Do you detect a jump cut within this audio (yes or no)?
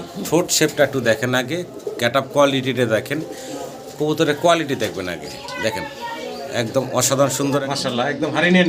yes